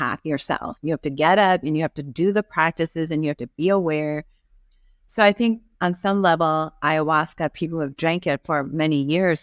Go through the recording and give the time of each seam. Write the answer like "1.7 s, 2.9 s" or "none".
none